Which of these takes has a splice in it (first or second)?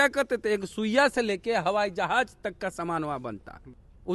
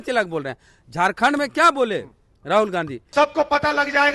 second